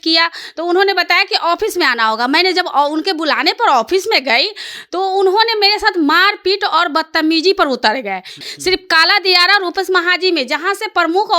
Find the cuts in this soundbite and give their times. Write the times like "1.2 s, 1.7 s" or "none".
8.4 s